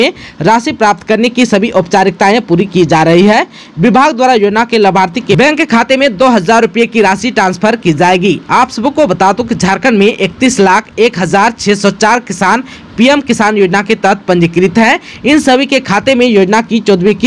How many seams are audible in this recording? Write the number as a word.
one